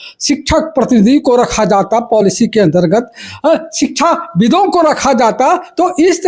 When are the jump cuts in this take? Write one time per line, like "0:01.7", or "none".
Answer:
none